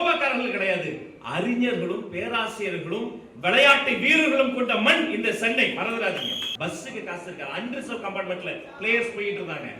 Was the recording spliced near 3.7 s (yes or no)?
no